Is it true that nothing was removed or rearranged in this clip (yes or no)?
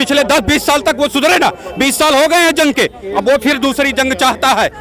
yes